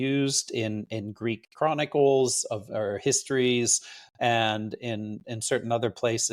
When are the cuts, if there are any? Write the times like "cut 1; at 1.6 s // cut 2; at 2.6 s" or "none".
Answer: none